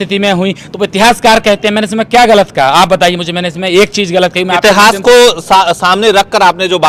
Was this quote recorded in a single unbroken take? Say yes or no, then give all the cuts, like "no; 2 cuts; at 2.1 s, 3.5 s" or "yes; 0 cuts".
yes; 0 cuts